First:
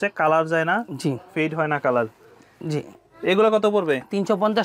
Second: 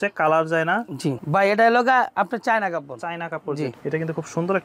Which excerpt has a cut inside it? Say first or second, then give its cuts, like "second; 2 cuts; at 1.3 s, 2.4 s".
second; 2 cuts; at 1.2 s, 3.8 s